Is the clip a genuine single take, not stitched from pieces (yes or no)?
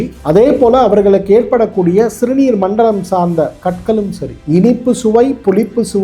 no